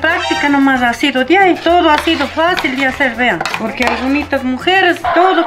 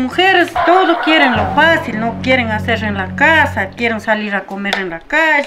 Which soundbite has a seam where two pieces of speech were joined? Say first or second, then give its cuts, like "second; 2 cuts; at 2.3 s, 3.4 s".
first; 1 cut; at 3.5 s